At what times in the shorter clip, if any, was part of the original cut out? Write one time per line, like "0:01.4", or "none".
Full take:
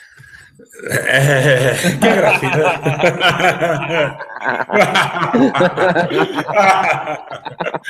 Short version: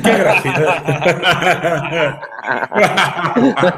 none